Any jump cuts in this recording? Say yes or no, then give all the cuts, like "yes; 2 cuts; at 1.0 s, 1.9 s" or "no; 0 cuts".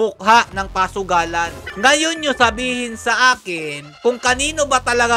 yes; 1 cut; at 1.6 s